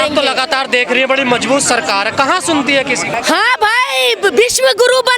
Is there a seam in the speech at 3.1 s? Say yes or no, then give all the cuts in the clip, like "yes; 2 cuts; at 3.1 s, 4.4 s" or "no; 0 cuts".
yes; 1 cut; at 3.1 s